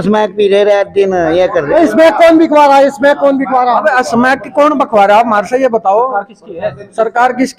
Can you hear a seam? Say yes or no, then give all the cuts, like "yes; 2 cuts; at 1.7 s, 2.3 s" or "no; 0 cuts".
no; 0 cuts